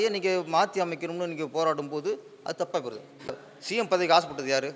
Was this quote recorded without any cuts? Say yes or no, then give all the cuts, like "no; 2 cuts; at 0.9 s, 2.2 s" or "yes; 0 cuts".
no; 1 cut; at 3.3 s